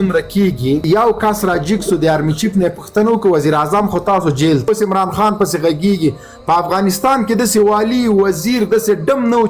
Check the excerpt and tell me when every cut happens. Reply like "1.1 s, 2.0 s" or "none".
0.8 s, 4.7 s